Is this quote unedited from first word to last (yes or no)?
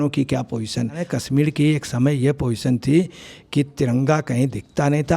no